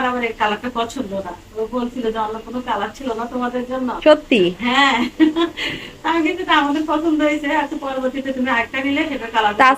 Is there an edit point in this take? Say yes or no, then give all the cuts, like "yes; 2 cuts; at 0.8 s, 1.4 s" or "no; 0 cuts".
no; 0 cuts